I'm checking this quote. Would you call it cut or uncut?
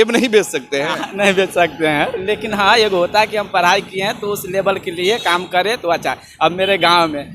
uncut